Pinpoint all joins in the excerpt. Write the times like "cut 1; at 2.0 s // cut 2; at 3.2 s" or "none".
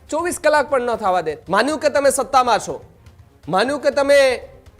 cut 1; at 1.4 s